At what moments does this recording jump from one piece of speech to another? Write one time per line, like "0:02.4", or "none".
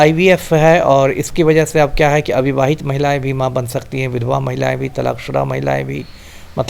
none